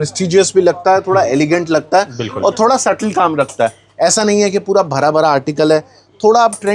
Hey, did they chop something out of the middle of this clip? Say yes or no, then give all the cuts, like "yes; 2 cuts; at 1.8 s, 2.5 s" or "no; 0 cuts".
no; 0 cuts